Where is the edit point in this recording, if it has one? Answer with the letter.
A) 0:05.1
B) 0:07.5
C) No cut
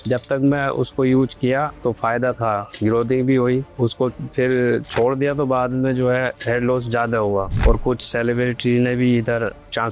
B